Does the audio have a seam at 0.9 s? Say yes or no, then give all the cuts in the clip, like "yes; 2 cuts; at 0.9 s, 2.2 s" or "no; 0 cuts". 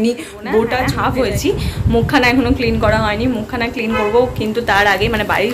yes; 1 cut; at 0.9 s